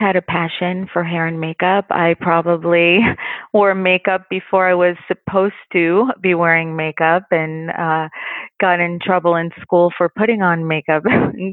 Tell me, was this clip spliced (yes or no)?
no